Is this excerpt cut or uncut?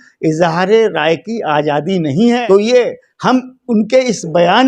cut